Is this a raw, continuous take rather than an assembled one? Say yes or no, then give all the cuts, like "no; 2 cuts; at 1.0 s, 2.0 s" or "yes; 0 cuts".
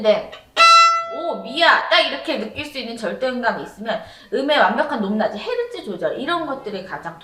yes; 0 cuts